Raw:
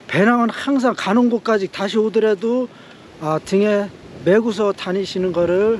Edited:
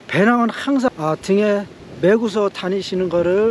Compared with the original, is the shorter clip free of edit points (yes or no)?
no